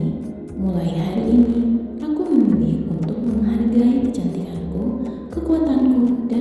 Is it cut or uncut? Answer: uncut